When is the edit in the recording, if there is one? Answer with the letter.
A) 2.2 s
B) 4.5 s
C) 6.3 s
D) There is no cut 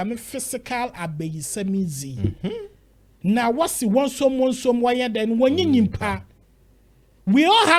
D